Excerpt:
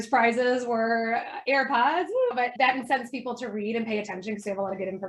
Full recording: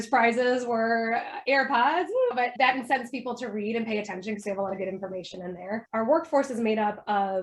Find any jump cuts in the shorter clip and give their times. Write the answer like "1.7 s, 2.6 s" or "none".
none